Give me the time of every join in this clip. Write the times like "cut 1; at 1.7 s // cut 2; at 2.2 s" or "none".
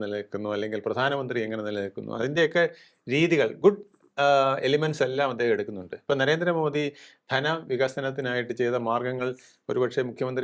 none